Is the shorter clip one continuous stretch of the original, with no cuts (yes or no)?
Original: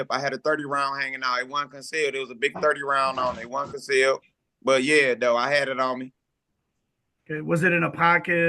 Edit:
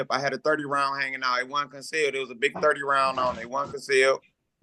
yes